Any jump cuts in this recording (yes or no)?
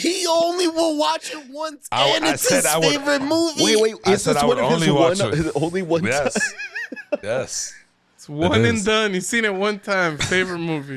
no